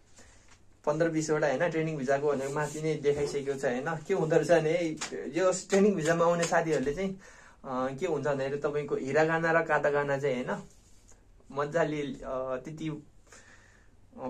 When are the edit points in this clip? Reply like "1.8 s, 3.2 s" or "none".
none